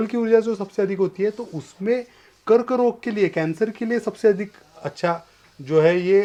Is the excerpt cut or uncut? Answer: uncut